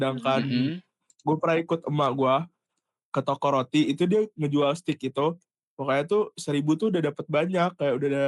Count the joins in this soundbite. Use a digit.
0